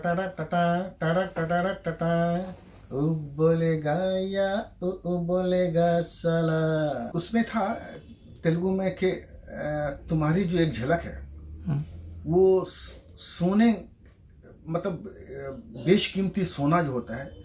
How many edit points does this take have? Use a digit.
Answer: 1